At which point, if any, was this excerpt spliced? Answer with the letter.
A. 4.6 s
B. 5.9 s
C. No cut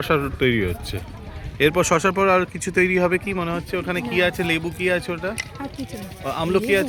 C